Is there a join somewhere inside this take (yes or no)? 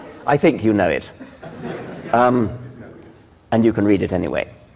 yes